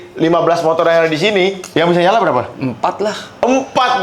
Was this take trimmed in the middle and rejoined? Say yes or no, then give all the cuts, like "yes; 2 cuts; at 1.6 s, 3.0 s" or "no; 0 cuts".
no; 0 cuts